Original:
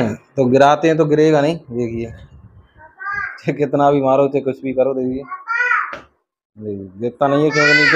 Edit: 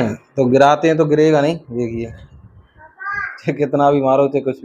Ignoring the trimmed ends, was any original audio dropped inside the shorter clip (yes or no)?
no